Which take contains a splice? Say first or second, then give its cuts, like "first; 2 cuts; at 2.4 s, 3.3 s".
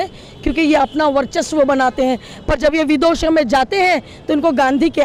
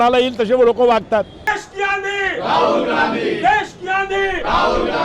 second; 1 cut; at 1.6 s